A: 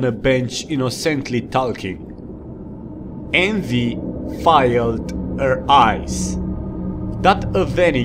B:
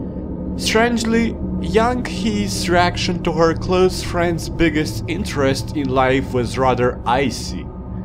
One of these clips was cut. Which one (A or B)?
B